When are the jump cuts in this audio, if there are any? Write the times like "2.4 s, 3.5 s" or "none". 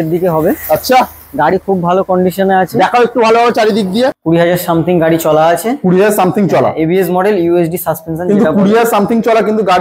4.2 s